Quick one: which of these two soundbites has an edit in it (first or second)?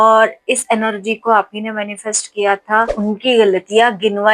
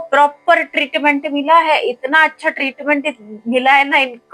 first